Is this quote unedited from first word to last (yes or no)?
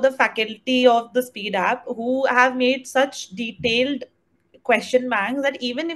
yes